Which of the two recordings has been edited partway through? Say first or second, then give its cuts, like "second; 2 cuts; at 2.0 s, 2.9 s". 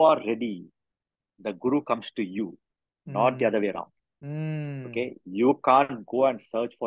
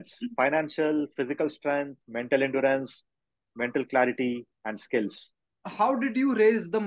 second; 1 cut; at 5.6 s